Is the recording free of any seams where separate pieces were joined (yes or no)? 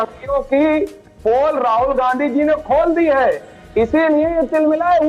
yes